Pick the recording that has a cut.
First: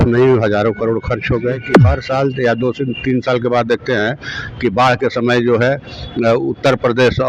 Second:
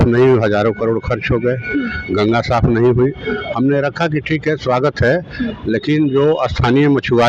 first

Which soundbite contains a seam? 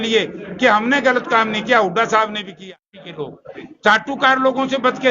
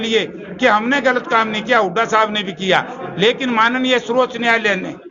first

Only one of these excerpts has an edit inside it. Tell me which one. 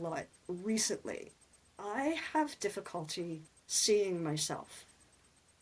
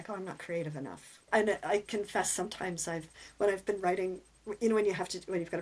second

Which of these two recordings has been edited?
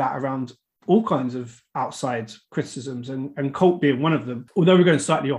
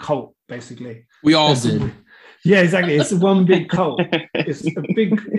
first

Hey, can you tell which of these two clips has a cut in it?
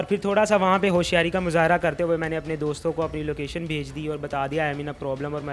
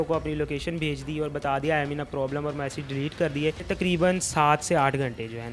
second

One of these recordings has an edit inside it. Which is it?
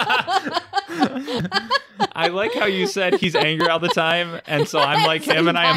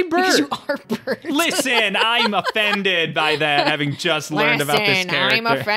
first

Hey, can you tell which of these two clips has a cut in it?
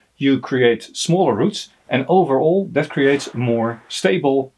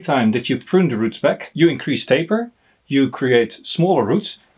second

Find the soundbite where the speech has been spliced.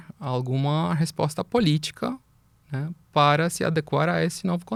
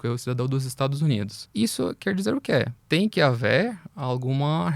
second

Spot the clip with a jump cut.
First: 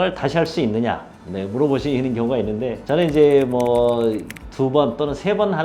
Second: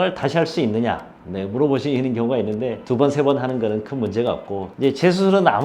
second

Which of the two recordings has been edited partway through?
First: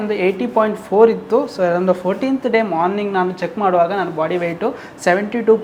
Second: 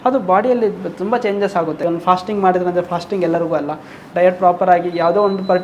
second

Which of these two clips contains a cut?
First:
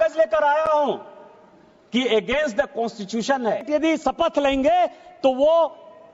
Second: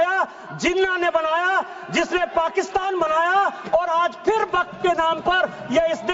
first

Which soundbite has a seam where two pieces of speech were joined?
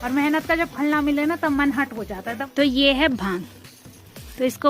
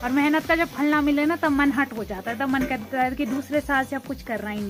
first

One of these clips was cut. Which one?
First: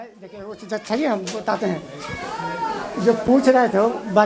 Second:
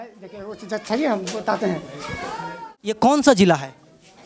second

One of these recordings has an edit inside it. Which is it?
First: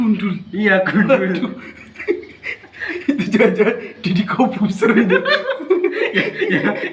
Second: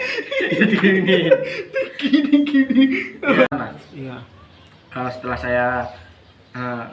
second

